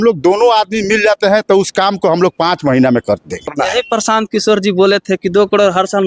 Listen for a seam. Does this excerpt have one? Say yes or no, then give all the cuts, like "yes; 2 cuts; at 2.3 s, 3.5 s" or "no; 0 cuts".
yes; 1 cut; at 3.5 s